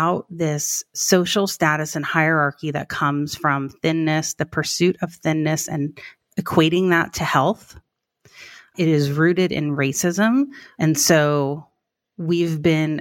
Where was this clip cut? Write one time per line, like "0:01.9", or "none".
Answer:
0:10.6